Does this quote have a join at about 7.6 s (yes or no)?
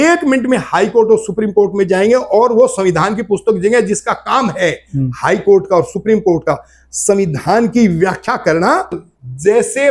no